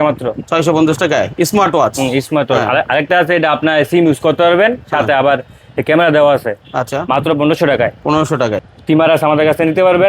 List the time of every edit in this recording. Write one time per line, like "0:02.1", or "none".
0:08.7